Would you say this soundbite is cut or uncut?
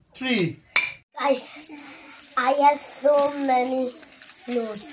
cut